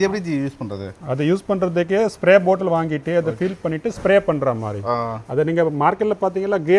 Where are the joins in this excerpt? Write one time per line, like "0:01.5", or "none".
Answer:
none